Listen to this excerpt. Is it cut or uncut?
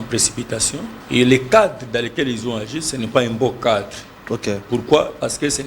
cut